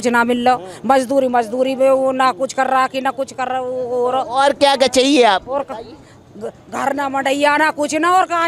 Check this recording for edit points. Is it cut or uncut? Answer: uncut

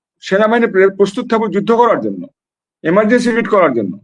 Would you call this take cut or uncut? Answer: uncut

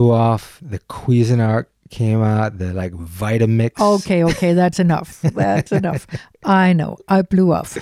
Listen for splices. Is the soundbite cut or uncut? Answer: uncut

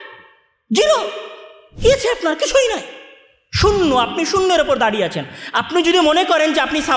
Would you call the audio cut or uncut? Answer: uncut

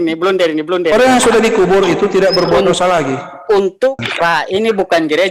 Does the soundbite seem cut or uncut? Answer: cut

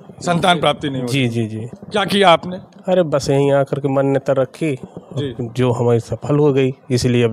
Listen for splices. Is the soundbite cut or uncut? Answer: uncut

